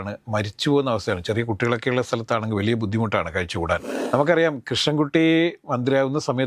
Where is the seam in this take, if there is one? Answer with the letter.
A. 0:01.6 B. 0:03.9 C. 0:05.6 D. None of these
B